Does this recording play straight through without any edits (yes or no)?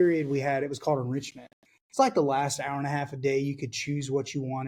yes